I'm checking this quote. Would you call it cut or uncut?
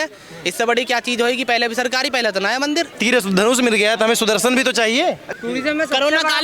cut